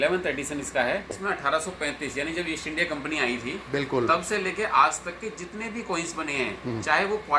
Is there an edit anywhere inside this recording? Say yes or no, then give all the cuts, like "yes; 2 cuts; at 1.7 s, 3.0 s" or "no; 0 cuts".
yes; 1 cut; at 1.0 s